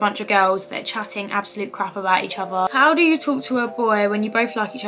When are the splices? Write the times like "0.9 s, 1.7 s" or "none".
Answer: 2.7 s